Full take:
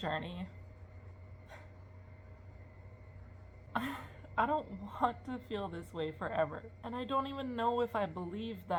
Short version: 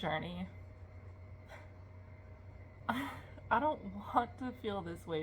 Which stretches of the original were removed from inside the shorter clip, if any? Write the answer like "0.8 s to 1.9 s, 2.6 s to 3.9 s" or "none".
2.8 s to 3.7 s